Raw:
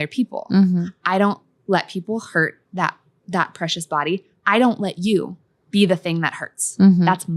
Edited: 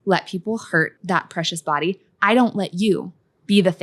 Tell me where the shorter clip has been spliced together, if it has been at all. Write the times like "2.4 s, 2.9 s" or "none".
1.0 s